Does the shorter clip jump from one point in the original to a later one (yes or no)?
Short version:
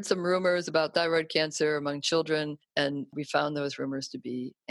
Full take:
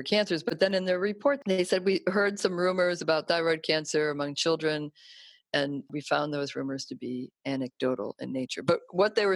yes